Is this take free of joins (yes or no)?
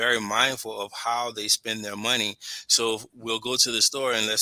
yes